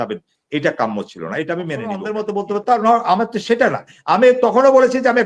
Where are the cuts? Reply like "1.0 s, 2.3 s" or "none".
2.2 s